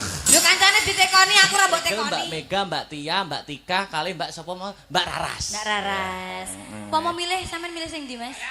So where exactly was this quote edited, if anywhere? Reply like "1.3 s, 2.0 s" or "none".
1.9 s